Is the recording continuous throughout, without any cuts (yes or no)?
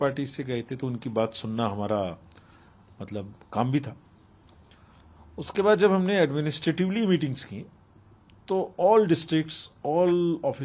yes